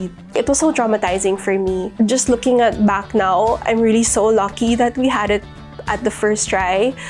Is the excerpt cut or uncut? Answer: cut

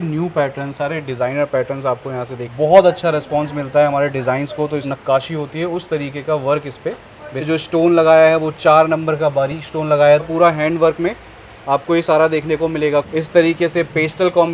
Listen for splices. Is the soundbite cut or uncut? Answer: cut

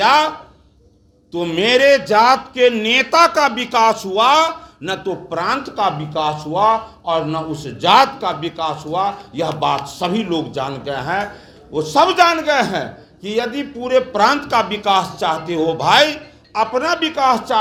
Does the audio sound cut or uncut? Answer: uncut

